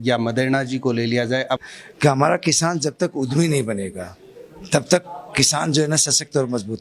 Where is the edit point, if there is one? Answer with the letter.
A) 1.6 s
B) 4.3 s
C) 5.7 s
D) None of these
A